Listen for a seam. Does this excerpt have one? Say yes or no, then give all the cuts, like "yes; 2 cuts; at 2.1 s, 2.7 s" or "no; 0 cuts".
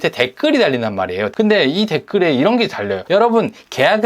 yes; 2 cuts; at 1.3 s, 3.0 s